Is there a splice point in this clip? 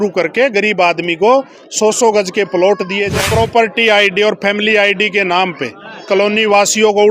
yes; 1 cut; at 3.3 s

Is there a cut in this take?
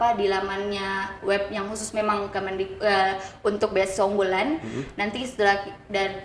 no; 0 cuts

